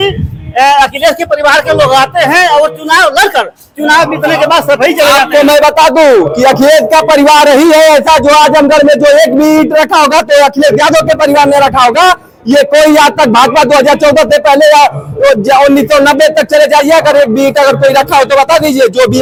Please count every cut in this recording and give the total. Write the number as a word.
zero